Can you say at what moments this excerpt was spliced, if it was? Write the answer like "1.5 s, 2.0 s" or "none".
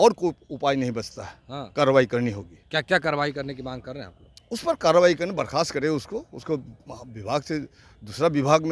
none